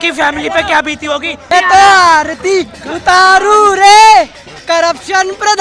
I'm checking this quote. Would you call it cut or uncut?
cut